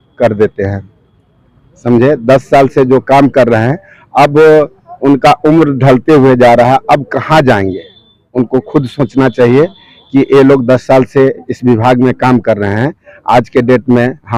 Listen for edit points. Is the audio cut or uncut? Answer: uncut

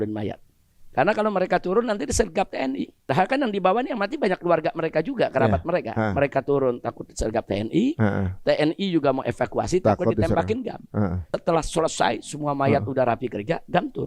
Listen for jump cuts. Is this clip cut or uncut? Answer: cut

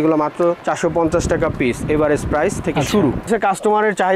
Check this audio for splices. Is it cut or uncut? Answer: cut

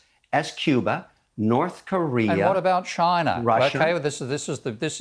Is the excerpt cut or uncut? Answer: uncut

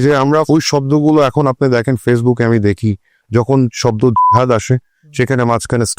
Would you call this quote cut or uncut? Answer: uncut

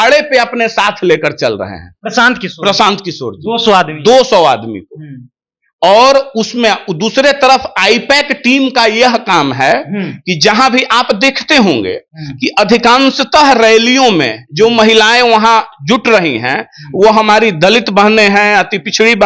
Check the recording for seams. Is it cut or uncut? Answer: uncut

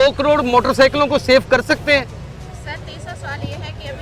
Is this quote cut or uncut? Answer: uncut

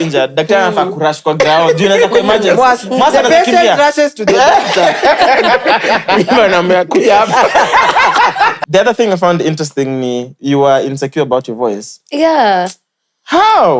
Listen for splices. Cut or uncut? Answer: cut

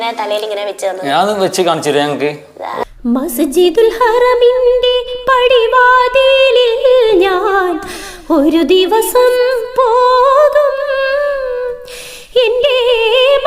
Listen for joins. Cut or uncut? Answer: cut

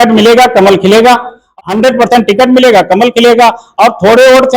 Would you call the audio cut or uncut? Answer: cut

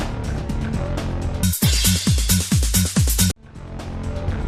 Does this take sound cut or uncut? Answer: uncut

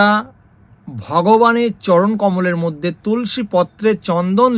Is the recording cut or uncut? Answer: uncut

